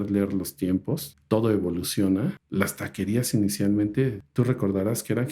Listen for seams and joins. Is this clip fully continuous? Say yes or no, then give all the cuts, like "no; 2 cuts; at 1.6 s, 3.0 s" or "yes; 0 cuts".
no; 3 cuts; at 1.1 s, 2.4 s, 4.2 s